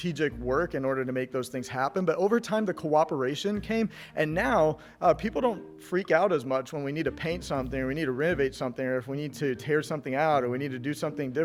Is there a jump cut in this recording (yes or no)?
no